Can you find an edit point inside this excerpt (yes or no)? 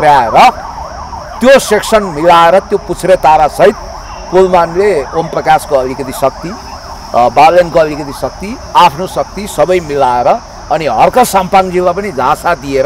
no